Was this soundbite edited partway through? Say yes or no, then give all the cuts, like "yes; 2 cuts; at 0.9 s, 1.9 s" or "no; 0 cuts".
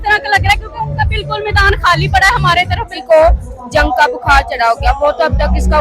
yes; 1 cut; at 2.9 s